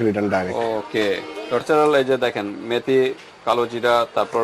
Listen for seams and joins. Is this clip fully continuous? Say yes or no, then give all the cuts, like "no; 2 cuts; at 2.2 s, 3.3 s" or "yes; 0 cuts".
no; 1 cut; at 1.6 s